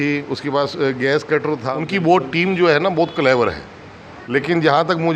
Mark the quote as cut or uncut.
cut